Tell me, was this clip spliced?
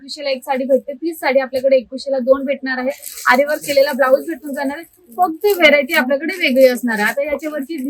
no; 0 cuts

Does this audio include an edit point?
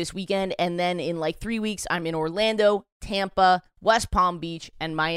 no; 0 cuts

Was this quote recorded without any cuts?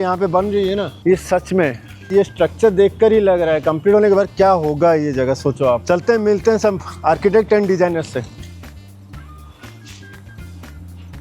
yes; 0 cuts

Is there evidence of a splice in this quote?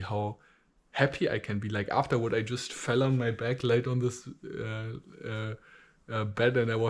no; 0 cuts

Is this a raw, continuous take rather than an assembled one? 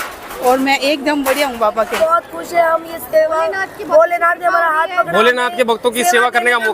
no; 1 cut; at 2.0 s

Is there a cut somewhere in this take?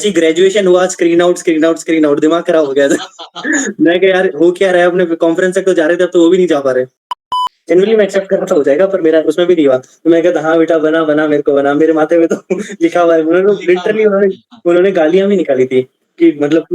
yes; 1 cut; at 7.2 s

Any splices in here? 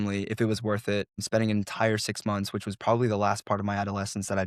no; 0 cuts

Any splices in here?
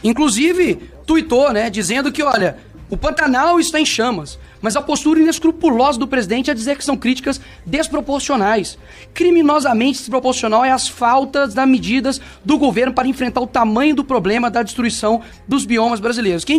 no; 0 cuts

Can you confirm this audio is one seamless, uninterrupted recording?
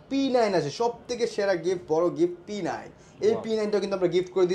yes; 0 cuts

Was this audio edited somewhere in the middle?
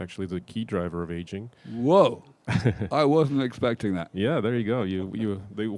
no; 0 cuts

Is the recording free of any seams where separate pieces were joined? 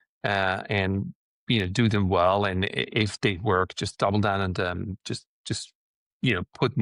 yes; 0 cuts

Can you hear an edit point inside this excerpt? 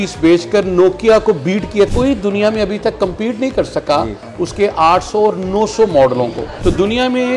yes; 2 cuts; at 1.9 s, 6.5 s

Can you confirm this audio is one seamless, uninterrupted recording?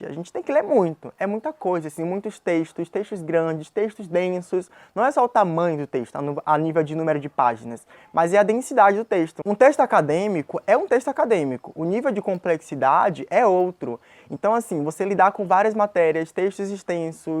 yes; 0 cuts

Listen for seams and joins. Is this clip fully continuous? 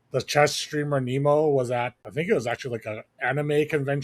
no; 1 cut; at 2.0 s

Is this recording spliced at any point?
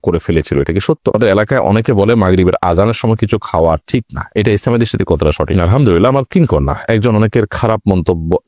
yes; 2 cuts; at 1.1 s, 5.6 s

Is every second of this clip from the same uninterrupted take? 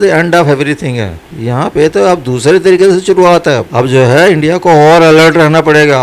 no; 1 cut; at 3.7 s

